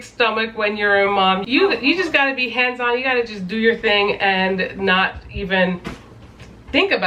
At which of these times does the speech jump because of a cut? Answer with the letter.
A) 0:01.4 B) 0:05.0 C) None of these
A